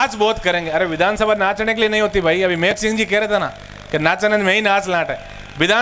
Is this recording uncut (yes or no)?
yes